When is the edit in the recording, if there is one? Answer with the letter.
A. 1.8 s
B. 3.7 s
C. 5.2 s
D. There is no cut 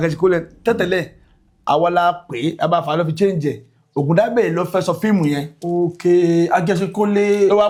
D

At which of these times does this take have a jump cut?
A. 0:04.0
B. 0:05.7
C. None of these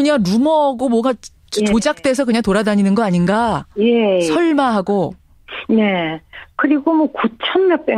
B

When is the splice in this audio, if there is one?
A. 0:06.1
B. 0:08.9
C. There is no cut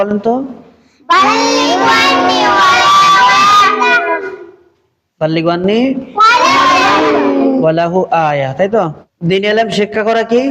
C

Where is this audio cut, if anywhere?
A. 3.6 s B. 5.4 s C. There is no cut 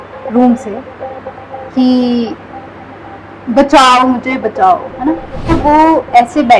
B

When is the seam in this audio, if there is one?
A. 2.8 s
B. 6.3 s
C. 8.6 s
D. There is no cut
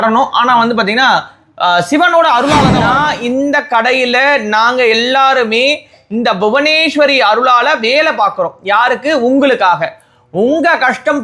A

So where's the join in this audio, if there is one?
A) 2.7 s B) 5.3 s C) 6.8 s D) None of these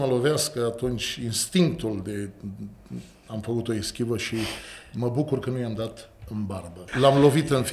C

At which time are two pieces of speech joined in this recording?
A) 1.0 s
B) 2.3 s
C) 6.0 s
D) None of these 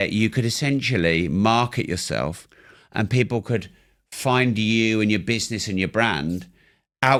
D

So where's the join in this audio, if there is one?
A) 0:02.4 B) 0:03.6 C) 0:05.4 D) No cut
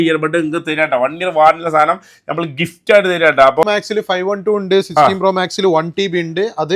B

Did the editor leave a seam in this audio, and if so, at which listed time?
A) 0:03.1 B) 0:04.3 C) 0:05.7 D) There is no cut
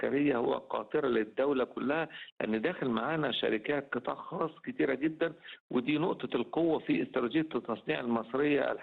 D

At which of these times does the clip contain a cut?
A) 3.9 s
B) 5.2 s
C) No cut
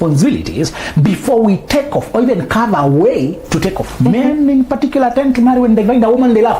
A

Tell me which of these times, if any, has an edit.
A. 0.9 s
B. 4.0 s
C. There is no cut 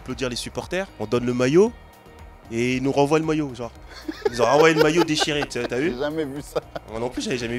A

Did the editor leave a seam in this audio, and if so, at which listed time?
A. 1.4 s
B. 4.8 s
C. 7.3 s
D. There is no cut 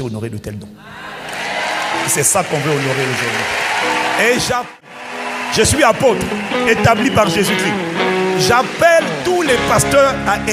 B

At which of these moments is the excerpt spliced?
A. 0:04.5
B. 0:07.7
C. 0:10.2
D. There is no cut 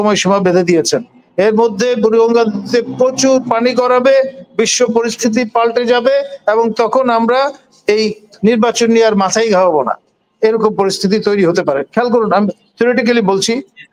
D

